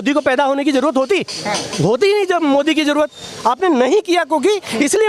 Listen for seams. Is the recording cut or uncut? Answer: uncut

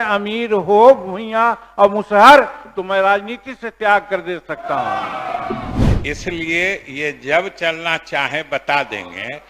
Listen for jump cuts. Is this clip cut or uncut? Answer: cut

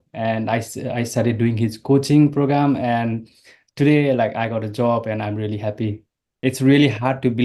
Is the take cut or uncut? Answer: cut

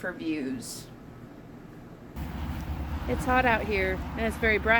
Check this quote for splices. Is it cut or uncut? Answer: cut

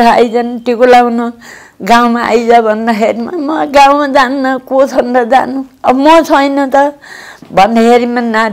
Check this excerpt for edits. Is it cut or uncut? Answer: uncut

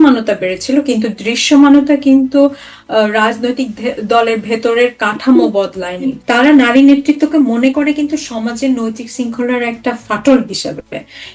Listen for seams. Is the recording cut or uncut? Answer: cut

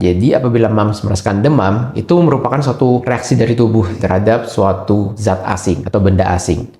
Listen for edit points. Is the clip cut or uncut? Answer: cut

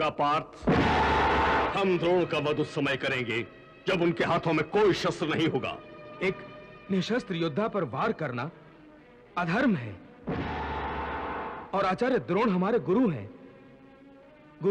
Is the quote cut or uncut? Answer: cut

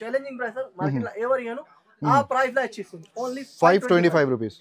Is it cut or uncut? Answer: uncut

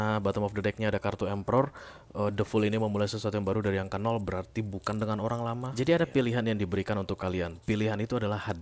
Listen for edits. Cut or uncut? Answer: cut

